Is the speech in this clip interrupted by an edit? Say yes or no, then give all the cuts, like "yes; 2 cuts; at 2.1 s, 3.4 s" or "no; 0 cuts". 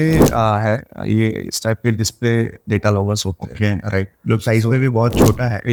no; 0 cuts